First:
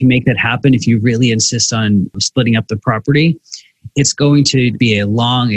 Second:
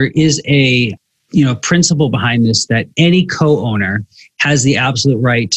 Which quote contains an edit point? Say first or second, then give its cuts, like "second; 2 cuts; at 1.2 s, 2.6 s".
first; 2 cuts; at 2.2 s, 4.8 s